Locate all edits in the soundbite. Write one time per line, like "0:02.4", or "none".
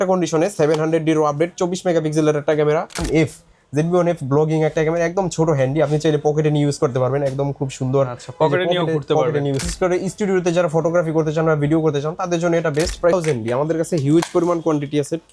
0:03.0
0:09.6
0:13.1